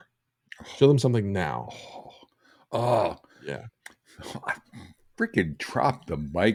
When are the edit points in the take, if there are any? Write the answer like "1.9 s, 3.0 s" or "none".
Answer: none